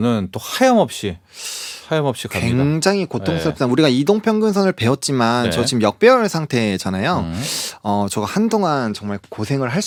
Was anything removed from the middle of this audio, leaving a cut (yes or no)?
no